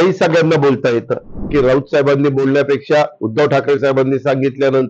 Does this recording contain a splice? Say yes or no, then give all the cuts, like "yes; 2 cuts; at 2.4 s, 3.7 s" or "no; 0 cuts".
yes; 1 cut; at 1.5 s